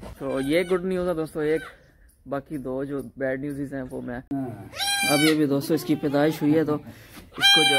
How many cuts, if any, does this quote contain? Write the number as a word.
one